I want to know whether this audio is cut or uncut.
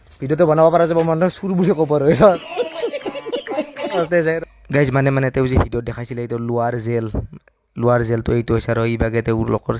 cut